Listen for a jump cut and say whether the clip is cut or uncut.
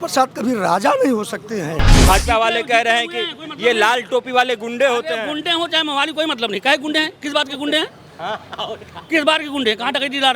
cut